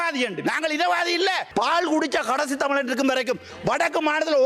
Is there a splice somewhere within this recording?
yes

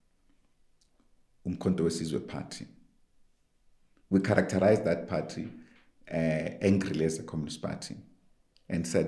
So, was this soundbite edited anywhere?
no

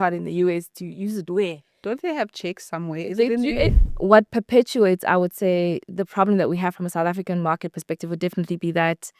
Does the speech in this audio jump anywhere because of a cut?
yes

